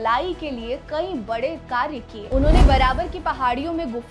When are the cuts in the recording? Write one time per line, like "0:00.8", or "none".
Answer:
0:02.2